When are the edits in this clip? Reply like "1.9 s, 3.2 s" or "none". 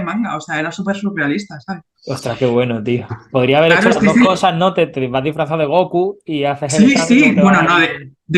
none